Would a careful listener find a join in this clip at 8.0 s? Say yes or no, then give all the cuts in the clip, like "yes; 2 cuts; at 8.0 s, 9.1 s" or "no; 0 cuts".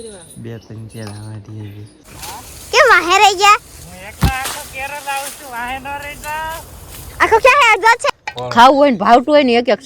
yes; 2 cuts; at 2.0 s, 8.0 s